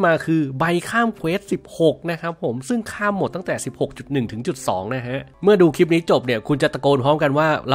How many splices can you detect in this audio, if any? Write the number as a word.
one